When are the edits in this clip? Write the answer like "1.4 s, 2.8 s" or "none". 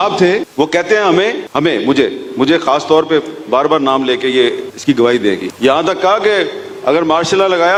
none